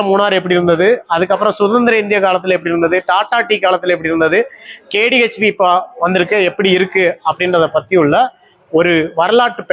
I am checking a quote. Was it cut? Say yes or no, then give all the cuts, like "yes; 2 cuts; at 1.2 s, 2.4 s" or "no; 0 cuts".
no; 0 cuts